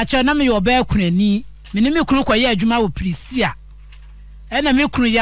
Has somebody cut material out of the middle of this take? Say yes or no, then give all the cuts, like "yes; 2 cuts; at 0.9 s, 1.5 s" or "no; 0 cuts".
yes; 1 cut; at 1.6 s